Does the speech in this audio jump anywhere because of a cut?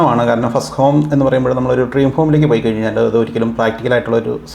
no; 0 cuts

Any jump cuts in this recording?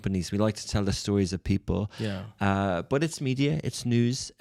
no; 0 cuts

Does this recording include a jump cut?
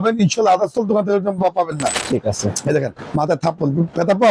yes; 1 cut; at 2.0 s

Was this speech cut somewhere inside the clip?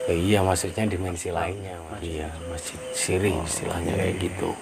yes; 1 cut; at 1.7 s

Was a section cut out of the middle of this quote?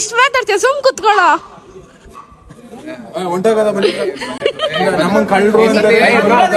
no; 0 cuts

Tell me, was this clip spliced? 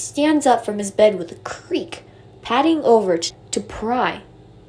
yes; 1 cut; at 3.3 s

